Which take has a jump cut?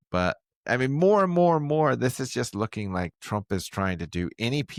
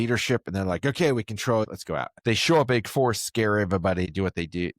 second; 2 cuts; at 2.1 s, 4.1 s

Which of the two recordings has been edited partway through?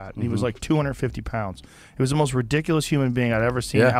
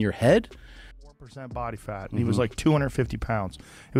second; 1 cut; at 1.0 s

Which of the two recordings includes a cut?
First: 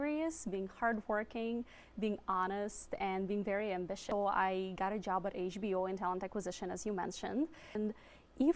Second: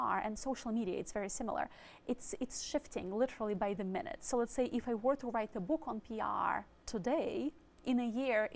first; 2 cuts; at 4.0 s, 7.8 s

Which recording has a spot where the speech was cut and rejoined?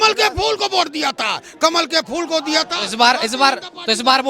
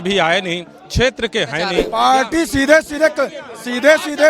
second; 1 cut; at 1.8 s

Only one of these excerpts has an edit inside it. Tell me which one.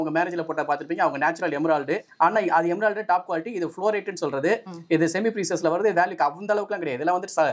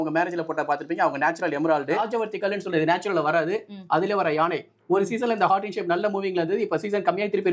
second; 1 cut; at 2.0 s

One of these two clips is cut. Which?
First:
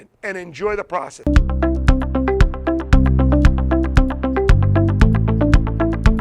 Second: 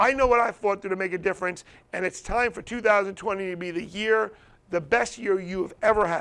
first; 1 cut; at 1.1 s

